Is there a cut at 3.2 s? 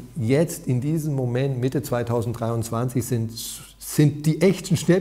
no; 0 cuts

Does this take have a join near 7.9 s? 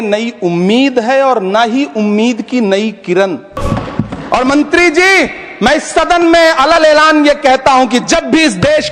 no; 1 cut; at 3.6 s

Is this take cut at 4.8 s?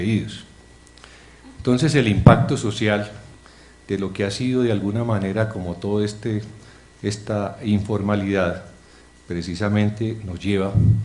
no; 1 cut; at 6.4 s

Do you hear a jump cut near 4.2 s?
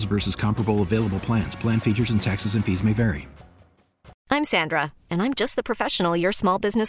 yes; 1 cut; at 4.2 s

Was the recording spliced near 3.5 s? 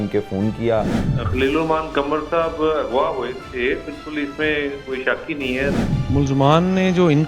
no; 2 cuts; at 1.1 s, 5.9 s

